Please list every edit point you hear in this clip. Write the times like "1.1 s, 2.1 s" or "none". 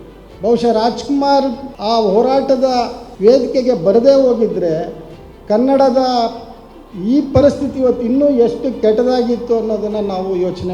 1.7 s, 3.0 s